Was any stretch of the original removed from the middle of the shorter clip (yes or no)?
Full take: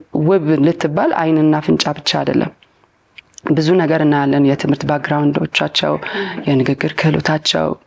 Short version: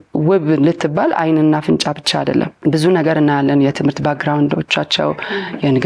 yes